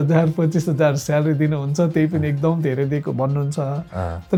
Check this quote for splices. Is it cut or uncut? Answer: uncut